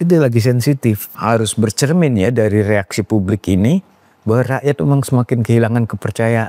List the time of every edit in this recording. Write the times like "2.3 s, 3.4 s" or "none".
1.1 s

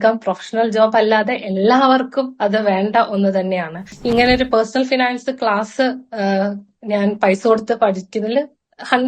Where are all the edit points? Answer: 4.0 s

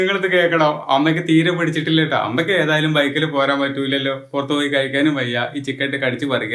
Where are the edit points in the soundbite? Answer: none

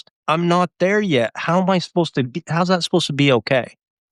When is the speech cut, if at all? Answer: none

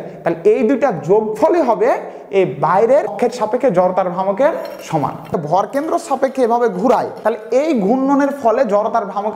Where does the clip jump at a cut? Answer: 3.1 s, 5.3 s, 7.1 s

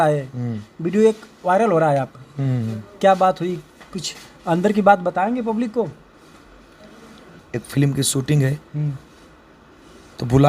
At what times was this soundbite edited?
7.4 s

